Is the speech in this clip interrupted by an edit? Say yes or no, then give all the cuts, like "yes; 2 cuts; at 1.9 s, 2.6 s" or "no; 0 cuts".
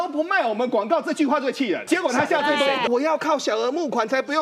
yes; 2 cuts; at 1.8 s, 2.9 s